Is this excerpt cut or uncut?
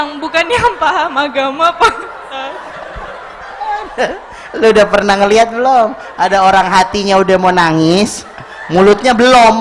uncut